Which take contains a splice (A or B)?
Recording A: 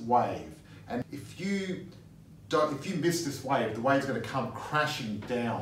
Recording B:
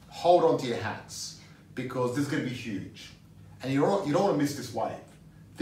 A